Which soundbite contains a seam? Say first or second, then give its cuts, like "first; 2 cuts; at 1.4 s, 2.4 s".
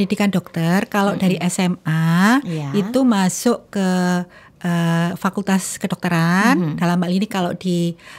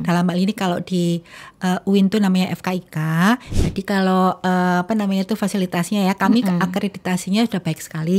second; 1 cut; at 3.5 s